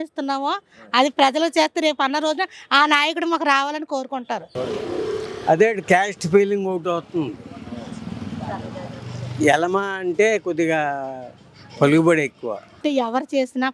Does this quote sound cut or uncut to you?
cut